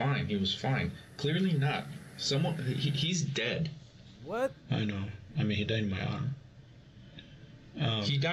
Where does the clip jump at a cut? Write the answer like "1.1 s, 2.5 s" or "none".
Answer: none

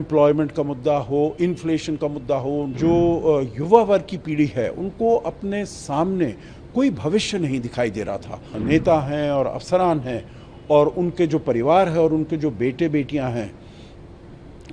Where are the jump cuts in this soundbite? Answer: 2.7 s, 8.5 s

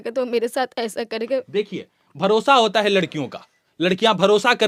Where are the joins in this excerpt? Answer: none

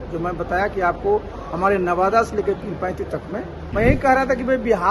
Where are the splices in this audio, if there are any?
3.6 s

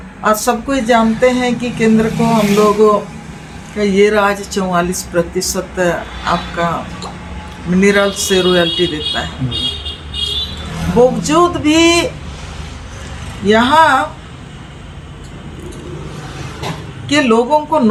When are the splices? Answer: none

